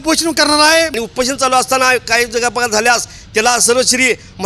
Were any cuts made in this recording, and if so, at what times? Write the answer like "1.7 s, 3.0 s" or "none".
0.9 s